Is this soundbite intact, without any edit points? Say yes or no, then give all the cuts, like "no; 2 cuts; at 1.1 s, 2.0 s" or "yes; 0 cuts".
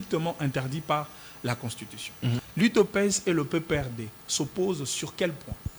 no; 1 cut; at 2.4 s